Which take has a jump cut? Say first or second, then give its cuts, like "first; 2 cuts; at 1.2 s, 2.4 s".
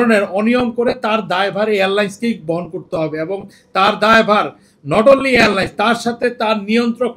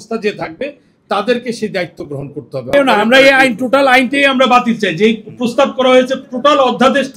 second; 1 cut; at 2.7 s